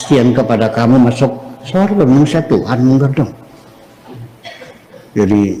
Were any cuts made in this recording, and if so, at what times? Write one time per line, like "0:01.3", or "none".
none